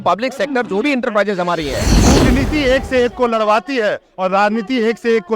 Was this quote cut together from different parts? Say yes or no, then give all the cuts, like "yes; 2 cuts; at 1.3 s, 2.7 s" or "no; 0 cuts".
yes; 1 cut; at 1.9 s